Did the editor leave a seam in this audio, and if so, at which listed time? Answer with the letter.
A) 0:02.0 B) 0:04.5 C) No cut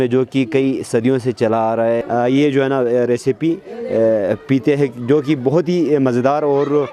A